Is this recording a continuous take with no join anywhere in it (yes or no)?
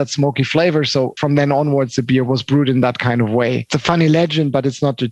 no